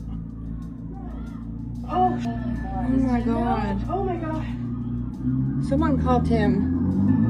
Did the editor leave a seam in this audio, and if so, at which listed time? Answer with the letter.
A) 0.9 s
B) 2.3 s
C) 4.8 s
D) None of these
B